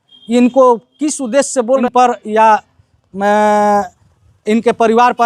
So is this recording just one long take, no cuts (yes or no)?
no